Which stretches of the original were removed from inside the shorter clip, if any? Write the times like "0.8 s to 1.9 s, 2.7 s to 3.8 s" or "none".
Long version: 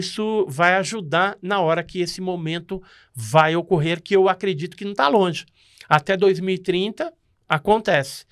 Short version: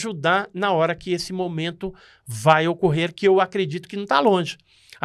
none